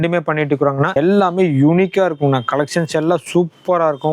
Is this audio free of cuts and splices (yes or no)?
no